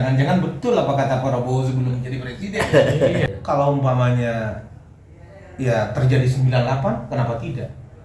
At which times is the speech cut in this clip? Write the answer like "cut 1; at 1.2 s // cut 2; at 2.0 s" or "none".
cut 1; at 3.2 s